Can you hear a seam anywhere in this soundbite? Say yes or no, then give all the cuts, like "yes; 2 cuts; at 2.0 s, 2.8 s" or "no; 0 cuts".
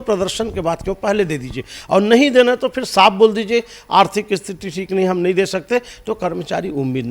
no; 0 cuts